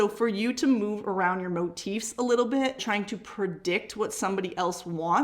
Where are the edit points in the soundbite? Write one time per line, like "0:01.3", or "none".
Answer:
0:02.8